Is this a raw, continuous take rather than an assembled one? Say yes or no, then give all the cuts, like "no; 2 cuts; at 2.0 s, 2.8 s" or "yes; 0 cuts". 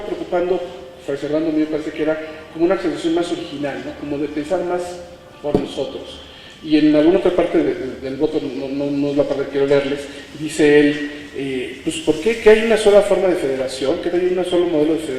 no; 1 cut; at 4.4 s